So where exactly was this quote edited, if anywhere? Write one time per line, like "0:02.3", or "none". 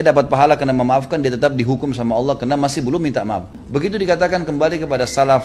0:03.6